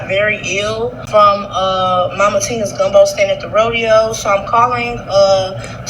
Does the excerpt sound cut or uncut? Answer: cut